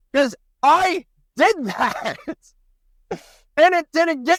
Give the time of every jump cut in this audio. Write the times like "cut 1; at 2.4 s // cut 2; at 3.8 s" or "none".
none

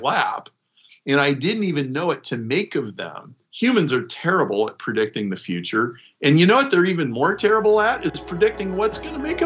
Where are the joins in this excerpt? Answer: cut 1; at 3.4 s

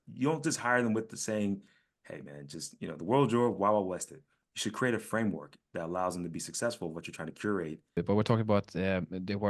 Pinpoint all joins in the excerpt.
cut 1; at 7.9 s

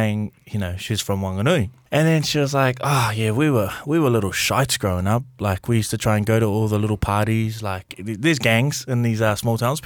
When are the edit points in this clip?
cut 1; at 1.8 s // cut 2; at 7.9 s

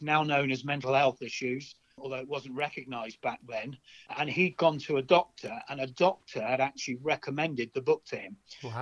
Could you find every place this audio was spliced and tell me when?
cut 1; at 2.0 s // cut 2; at 4.1 s

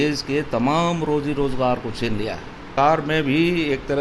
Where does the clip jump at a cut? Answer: cut 1; at 2.7 s

